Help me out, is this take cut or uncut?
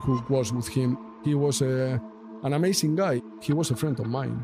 cut